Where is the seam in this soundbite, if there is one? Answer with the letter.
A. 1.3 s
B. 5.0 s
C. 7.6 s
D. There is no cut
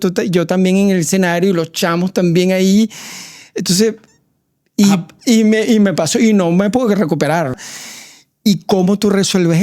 C